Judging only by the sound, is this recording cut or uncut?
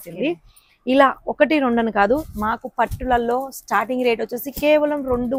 uncut